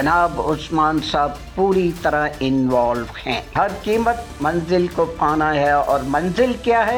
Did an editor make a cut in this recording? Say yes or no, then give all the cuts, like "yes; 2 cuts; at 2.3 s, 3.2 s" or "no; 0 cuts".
no; 0 cuts